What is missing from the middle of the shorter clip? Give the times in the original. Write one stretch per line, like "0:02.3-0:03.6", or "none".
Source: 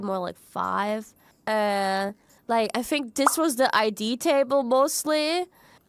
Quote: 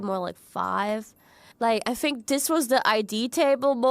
0:01.3-0:02.2